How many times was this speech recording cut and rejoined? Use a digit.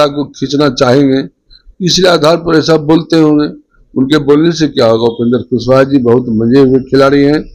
0